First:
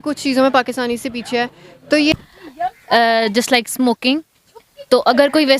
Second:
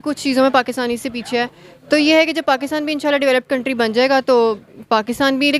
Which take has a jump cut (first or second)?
first